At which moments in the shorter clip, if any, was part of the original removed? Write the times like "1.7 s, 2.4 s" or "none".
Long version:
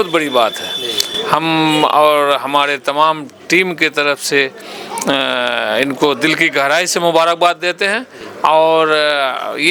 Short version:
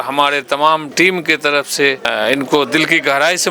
0.9 s, 2.0 s